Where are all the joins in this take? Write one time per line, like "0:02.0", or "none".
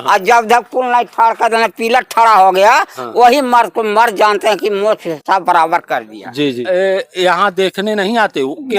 0:06.6

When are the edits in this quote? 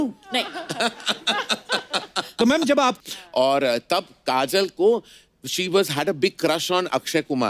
0:02.9

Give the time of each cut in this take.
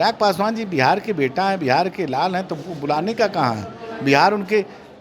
none

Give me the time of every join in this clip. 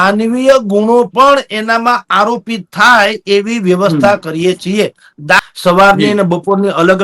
0:05.4

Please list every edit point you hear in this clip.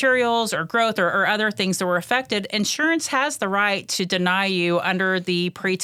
none

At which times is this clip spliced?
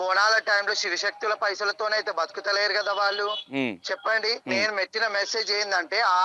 0:03.4
0:04.4

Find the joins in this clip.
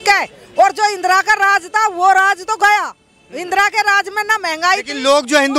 none

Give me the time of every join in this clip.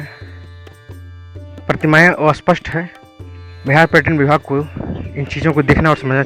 none

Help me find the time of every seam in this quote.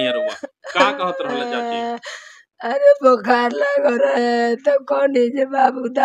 none

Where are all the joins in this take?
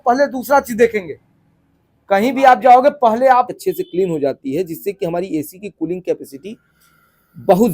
0:03.5

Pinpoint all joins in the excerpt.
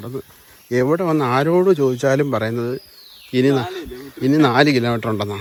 none

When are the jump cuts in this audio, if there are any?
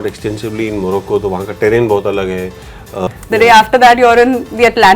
0:02.9

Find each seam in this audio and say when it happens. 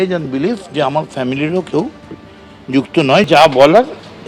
0:03.3

